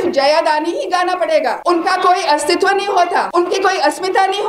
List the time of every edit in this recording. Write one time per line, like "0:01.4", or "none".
0:01.6
0:03.3